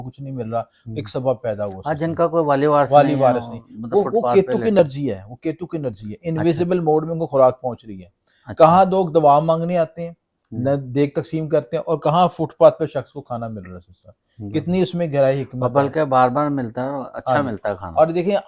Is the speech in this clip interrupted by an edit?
no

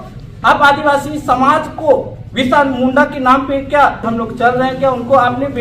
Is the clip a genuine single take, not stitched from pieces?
no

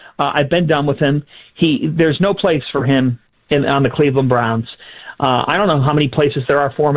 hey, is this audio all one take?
yes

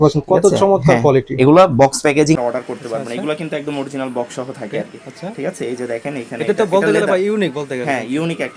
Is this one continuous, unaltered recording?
no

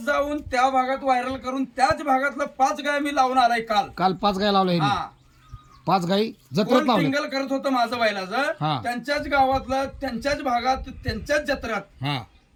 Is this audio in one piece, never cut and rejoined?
yes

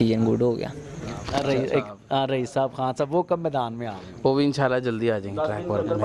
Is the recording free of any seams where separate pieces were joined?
no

